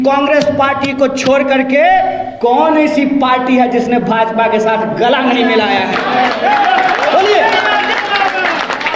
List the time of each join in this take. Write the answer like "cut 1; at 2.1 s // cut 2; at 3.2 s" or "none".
none